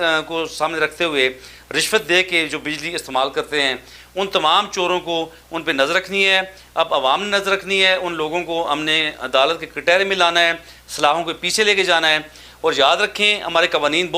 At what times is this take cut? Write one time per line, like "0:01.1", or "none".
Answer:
none